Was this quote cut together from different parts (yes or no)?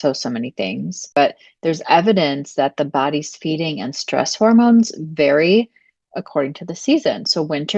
yes